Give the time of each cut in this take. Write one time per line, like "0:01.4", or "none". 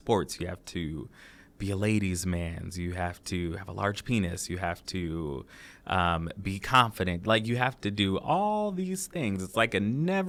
none

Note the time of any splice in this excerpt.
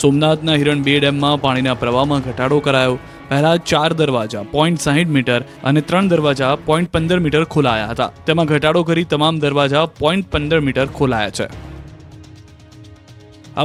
none

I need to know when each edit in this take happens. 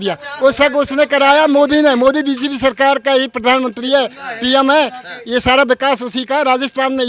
none

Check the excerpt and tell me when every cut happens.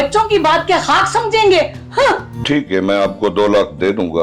0:02.4

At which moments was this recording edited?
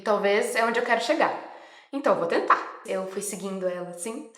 0:02.8

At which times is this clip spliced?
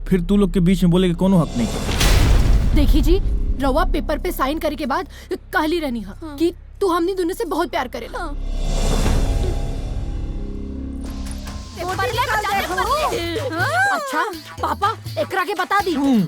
0:11.8

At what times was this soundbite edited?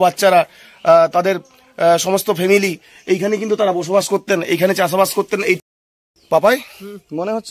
0:05.6

